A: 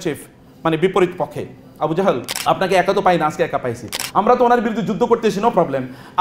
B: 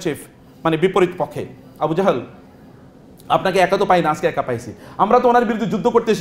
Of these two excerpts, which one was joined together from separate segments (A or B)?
A